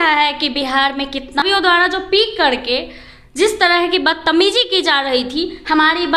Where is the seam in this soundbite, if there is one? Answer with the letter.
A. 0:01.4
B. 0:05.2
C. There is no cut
A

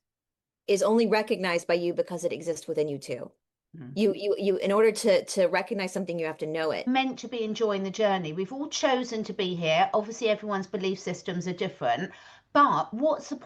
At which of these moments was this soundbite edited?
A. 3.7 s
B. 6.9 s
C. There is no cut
B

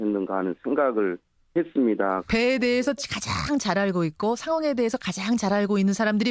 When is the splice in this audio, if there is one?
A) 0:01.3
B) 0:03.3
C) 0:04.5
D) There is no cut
A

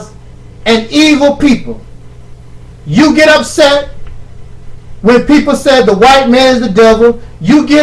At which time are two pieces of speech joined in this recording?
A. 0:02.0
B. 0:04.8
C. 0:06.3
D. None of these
C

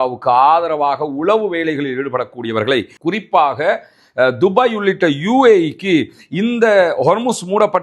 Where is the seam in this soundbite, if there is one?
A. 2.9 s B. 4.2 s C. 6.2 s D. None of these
A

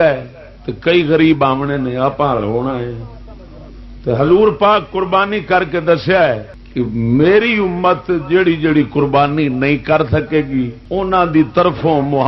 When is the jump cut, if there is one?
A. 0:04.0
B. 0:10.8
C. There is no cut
B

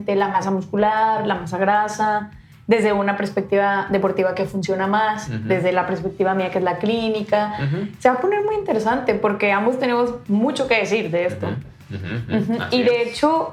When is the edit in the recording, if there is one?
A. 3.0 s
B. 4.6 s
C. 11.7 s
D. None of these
D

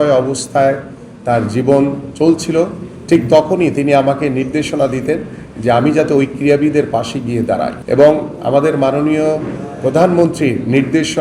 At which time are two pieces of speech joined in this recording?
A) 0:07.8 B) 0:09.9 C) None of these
A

